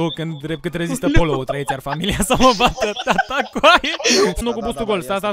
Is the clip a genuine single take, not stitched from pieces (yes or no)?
no